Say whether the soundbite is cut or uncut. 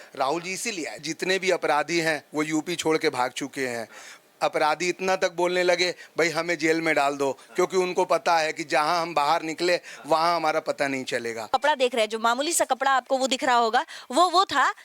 cut